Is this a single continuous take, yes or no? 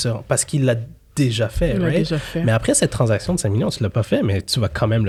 yes